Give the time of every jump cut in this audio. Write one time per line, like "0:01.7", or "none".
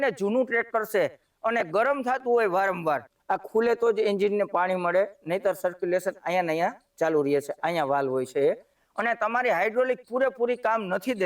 0:03.1
0:08.7

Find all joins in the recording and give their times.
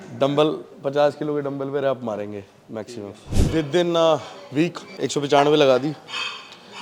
0:03.4
0:04.8

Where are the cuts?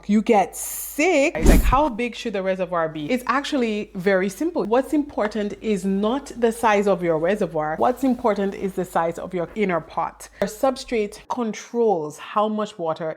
0:01.5
0:04.7
0:07.7
0:10.2

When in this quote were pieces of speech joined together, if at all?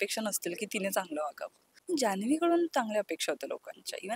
0:01.7

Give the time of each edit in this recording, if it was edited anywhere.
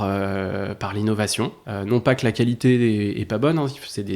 0:01.6

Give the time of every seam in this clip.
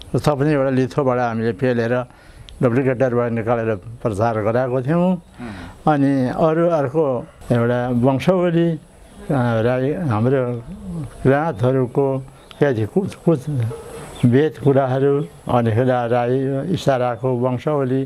none

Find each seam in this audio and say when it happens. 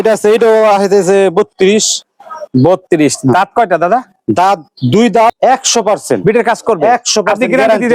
0:05.4

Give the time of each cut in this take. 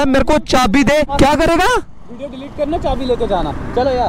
0:01.1

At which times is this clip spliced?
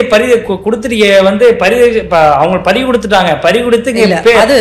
none

